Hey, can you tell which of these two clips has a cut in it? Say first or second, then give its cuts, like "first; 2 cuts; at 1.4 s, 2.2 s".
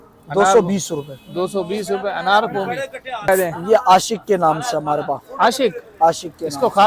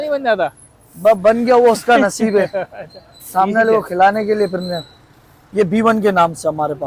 first; 1 cut; at 3.3 s